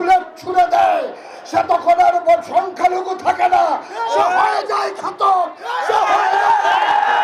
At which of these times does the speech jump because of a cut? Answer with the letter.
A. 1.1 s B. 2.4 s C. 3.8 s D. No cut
D